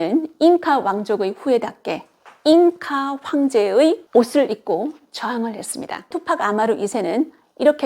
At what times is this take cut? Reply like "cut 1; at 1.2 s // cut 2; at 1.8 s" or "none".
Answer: cut 1; at 6.2 s